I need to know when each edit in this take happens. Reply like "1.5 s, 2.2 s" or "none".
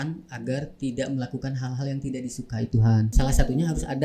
3.1 s